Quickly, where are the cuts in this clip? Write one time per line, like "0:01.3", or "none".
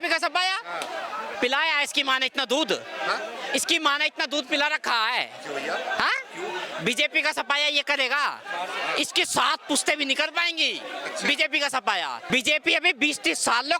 0:12.2